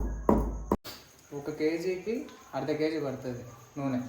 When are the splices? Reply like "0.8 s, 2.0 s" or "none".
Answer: 0.9 s

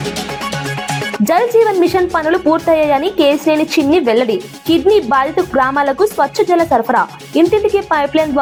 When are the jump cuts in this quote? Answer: none

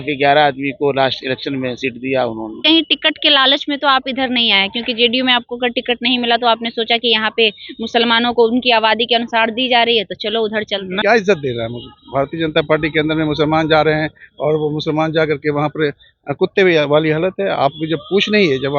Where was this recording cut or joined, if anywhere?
2.6 s, 10.9 s

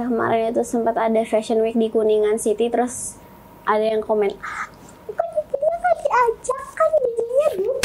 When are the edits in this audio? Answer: none

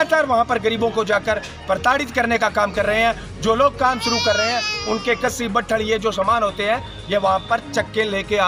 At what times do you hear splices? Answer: none

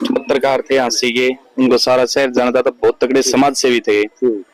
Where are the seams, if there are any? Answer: none

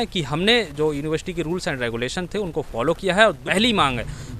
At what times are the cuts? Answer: 3.4 s

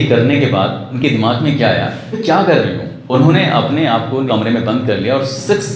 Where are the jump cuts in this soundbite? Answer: 0.9 s, 2.2 s, 2.9 s, 4.2 s

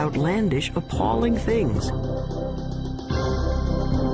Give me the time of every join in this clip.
3.1 s

